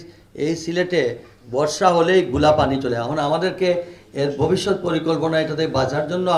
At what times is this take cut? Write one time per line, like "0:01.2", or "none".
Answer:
none